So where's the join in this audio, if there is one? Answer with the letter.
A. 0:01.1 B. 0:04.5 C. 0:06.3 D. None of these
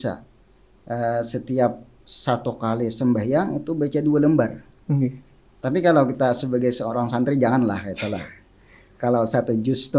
D